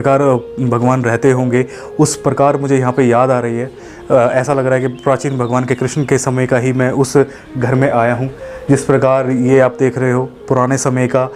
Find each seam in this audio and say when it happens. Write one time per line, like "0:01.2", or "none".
none